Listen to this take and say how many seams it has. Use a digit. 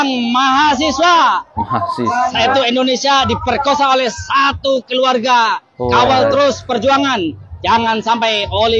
0